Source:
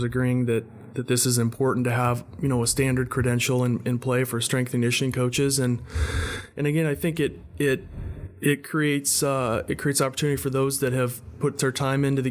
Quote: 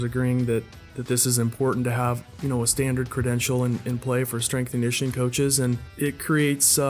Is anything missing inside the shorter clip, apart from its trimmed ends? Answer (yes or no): yes